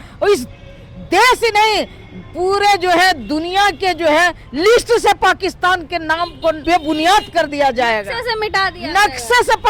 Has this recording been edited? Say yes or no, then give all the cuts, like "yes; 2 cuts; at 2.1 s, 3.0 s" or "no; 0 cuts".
yes; 1 cut; at 6.6 s